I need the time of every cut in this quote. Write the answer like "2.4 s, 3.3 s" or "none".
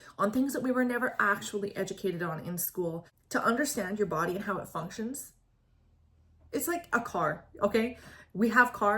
3.1 s